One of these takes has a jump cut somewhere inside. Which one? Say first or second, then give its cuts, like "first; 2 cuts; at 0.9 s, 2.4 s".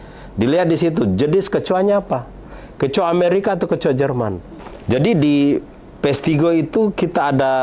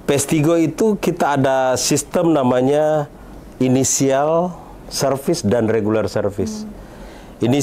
first; 1 cut; at 4.4 s